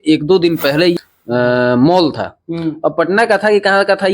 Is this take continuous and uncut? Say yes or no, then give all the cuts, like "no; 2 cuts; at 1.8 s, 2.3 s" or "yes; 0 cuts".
no; 1 cut; at 0.9 s